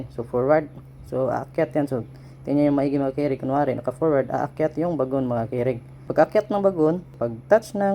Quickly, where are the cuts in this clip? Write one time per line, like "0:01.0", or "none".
0:05.9
0:07.1